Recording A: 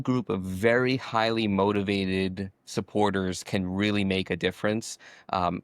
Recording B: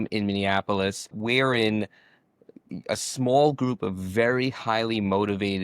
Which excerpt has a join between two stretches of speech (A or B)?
B